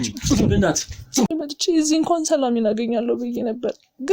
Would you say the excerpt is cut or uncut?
cut